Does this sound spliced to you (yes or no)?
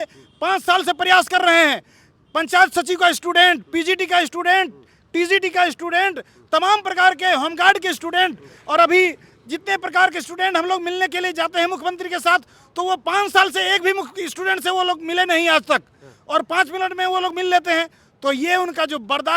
no